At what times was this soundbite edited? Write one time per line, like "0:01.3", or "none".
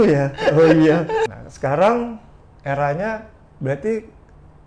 0:01.2